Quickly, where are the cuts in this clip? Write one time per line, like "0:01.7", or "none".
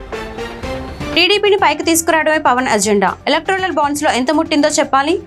0:01.1